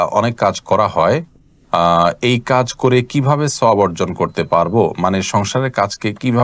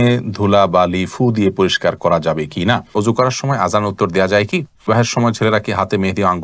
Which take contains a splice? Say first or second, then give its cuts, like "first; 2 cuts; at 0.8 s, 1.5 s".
second; 2 cuts; at 2.9 s, 4.9 s